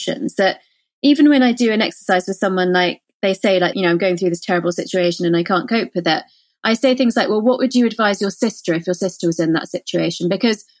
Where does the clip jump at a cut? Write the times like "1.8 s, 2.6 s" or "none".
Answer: 3.7 s